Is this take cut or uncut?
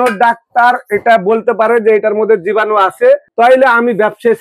cut